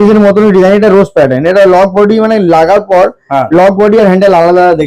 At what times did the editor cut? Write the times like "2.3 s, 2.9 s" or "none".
none